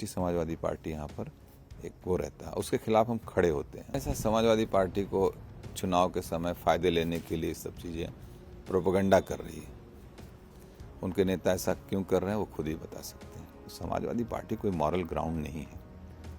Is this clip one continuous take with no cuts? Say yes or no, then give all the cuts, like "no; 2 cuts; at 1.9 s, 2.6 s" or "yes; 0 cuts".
no; 2 cuts; at 3.8 s, 13.7 s